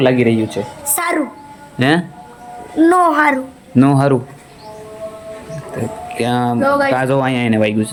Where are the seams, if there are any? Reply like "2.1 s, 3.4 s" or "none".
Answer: none